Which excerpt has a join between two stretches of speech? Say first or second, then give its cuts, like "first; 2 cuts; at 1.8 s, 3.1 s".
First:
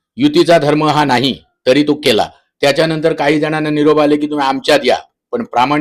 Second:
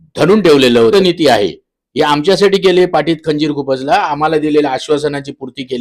second; 1 cut; at 0.9 s